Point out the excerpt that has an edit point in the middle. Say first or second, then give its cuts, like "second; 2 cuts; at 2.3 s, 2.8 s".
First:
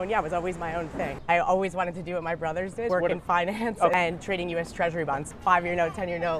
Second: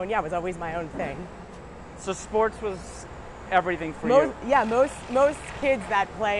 first; 4 cuts; at 1.2 s, 2.9 s, 3.9 s, 5.3 s